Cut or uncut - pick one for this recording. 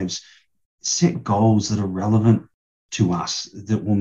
uncut